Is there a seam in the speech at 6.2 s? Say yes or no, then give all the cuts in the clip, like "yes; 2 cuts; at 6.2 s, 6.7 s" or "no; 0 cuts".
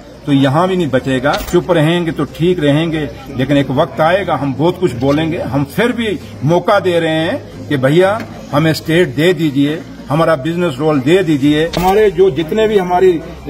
no; 2 cuts; at 1.4 s, 11.8 s